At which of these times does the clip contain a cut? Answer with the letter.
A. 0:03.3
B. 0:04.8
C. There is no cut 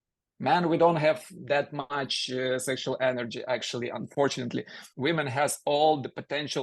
B